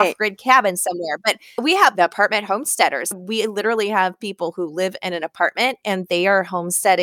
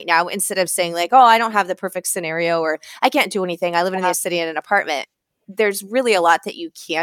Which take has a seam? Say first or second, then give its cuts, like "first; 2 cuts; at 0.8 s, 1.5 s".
first; 2 cuts; at 1.6 s, 3.1 s